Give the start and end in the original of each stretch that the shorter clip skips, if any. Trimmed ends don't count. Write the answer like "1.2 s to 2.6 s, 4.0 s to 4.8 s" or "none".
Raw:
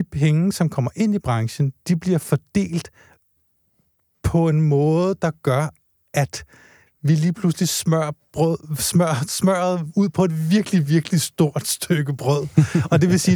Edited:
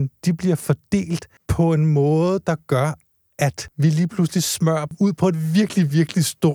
3.0 s to 4.1 s, 6.4 s to 6.9 s, 8.2 s to 9.9 s